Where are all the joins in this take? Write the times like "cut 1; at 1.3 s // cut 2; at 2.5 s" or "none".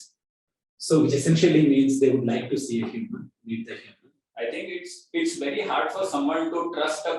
cut 1; at 4.2 s

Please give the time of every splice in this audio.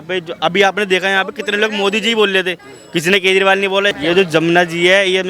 cut 1; at 3.9 s

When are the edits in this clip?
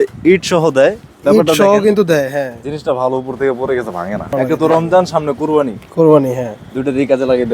cut 1; at 4.3 s

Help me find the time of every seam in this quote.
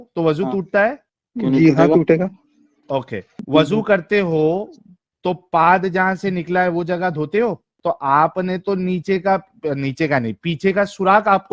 cut 1; at 7.7 s

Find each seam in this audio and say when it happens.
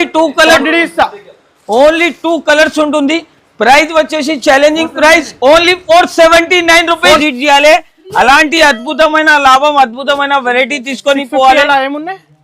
cut 1; at 7.2 s

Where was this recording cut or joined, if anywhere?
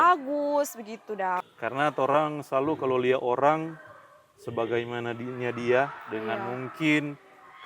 cut 1; at 1.4 s

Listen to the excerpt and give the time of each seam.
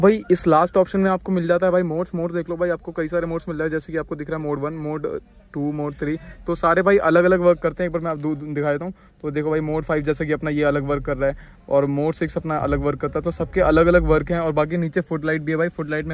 none

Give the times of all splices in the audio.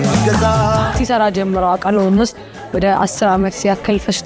cut 1; at 0.9 s

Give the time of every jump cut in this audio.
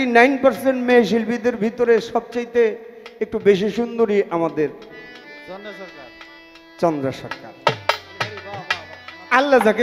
none

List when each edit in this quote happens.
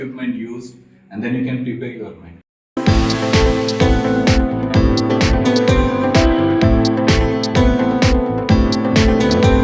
cut 1; at 2.7 s

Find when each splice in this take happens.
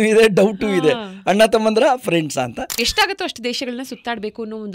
cut 1; at 2.7 s

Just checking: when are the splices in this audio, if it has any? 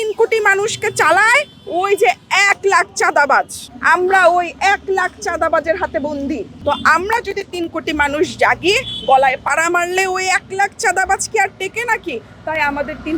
none

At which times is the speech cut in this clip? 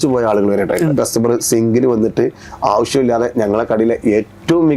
cut 1; at 1.0 s

